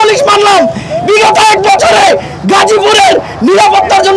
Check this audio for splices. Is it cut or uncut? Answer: uncut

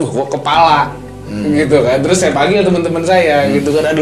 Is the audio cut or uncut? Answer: uncut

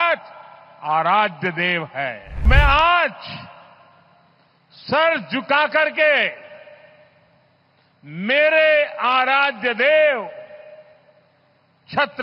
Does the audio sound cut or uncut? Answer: cut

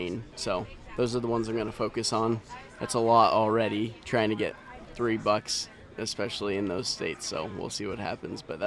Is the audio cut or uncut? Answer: uncut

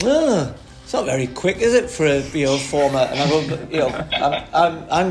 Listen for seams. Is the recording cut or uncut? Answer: uncut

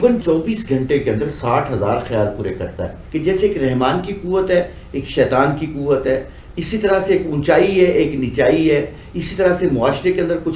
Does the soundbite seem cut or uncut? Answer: cut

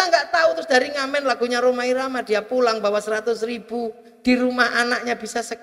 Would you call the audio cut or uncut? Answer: uncut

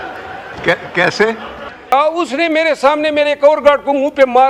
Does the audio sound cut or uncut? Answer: cut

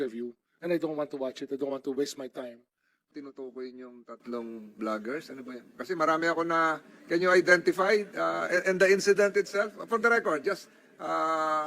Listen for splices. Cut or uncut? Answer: cut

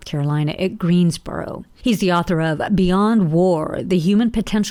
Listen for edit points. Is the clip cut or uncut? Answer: uncut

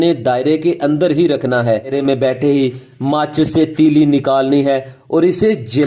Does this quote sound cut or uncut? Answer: cut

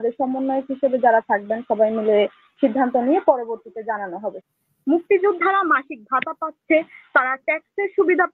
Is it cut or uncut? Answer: cut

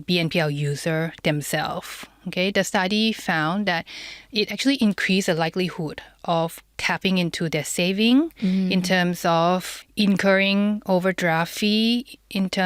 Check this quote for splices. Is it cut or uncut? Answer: cut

